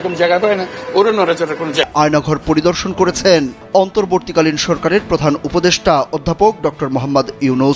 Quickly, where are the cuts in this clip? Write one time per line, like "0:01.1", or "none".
0:01.9